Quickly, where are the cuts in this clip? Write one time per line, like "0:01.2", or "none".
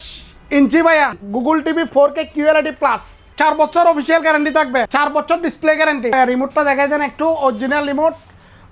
0:01.2
0:03.2
0:04.9
0:06.1